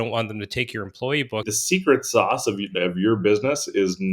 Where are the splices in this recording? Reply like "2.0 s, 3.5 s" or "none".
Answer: 1.5 s